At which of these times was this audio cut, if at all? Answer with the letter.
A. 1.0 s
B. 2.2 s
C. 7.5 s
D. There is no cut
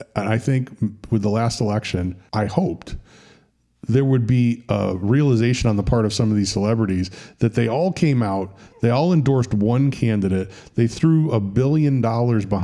B